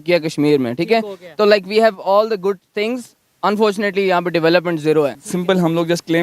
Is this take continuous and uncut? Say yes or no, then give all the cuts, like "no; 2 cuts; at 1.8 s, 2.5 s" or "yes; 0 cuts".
no; 1 cut; at 5.3 s